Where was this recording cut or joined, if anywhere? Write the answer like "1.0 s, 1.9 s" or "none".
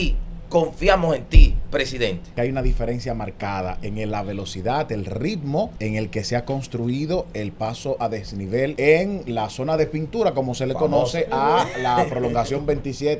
2.3 s, 5.8 s, 8.7 s